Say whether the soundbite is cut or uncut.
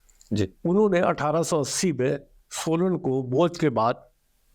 uncut